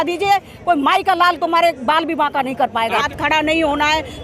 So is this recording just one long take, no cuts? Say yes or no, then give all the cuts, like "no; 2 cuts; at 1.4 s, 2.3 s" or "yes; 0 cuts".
no; 1 cut; at 3.0 s